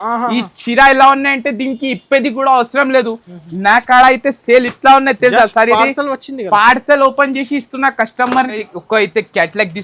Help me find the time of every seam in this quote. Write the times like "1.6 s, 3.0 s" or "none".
8.5 s